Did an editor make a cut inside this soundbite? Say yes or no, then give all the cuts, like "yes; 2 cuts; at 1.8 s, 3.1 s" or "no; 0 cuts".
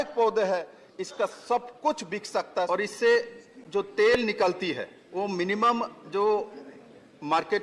yes; 2 cuts; at 2.7 s, 4.9 s